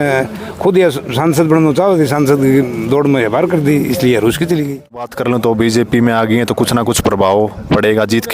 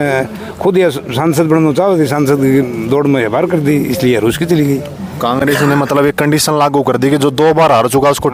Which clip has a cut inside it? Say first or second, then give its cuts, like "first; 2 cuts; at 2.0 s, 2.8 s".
first; 1 cut; at 5.1 s